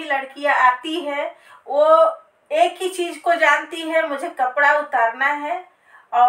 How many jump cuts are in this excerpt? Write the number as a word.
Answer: zero